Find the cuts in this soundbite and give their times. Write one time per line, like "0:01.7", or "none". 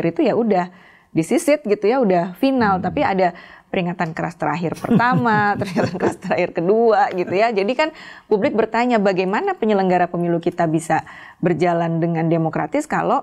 none